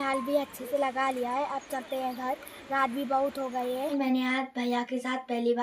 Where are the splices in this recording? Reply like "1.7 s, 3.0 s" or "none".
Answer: 4.0 s